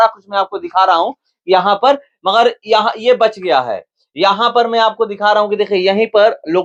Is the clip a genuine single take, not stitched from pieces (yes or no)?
yes